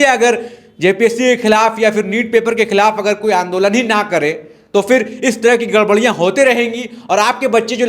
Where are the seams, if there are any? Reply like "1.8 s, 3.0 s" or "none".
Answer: none